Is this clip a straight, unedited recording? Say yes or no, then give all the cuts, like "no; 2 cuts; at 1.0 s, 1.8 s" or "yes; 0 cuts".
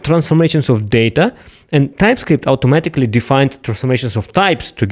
yes; 0 cuts